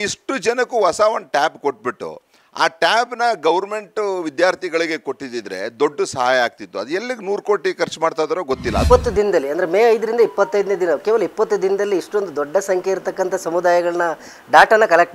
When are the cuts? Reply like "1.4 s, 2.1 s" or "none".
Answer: 8.8 s